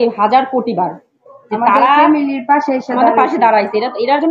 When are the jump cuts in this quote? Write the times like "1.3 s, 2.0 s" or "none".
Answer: none